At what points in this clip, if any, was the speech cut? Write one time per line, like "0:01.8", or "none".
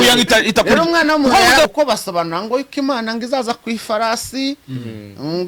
0:01.7